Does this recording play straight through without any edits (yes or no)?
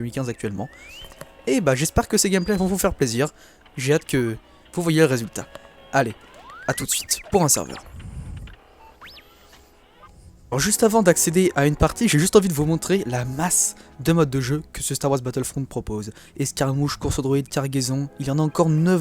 yes